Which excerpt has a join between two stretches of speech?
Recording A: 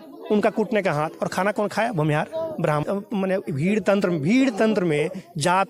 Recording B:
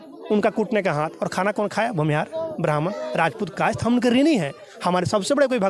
A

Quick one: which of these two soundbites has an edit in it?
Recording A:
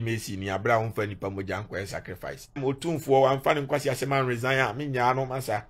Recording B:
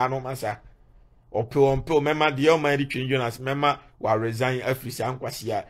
A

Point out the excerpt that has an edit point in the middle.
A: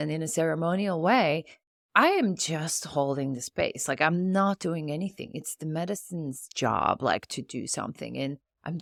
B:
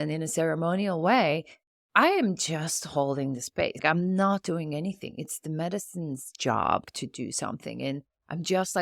B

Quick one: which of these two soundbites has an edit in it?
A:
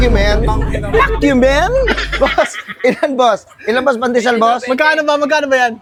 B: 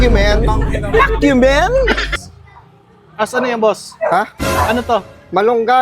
B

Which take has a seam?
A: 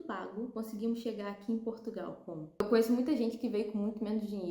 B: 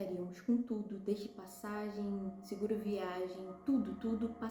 A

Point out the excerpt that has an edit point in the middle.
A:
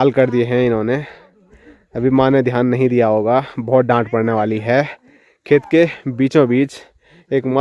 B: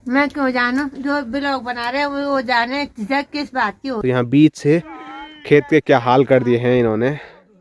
B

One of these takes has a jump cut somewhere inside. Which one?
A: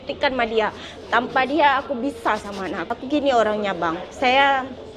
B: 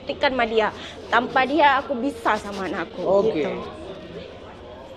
A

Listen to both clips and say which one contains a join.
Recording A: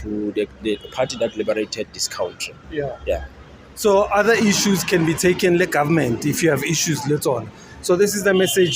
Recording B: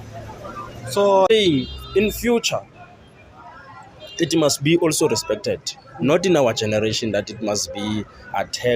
B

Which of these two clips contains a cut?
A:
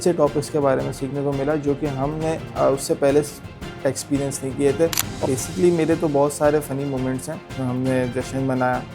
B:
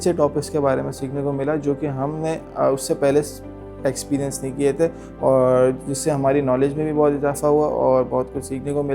A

